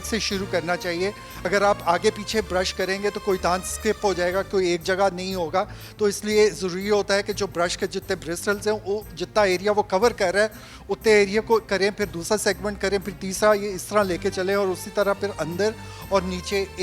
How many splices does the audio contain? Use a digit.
0